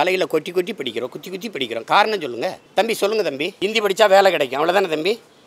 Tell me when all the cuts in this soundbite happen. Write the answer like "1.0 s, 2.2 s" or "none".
2.6 s, 3.5 s

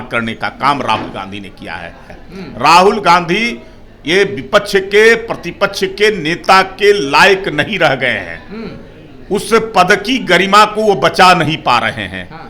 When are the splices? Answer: 2.2 s

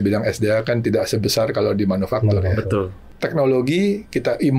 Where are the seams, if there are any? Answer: 3.1 s

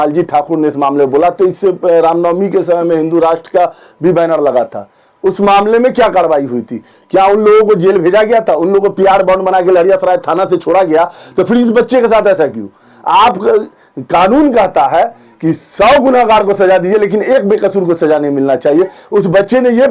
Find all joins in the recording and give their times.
none

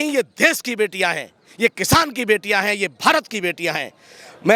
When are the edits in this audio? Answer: none

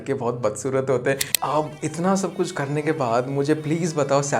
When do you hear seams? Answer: 1.3 s

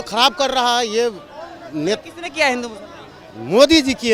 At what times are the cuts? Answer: none

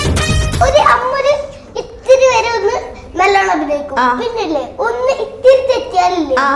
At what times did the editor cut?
none

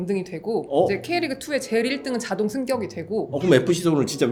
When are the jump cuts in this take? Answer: none

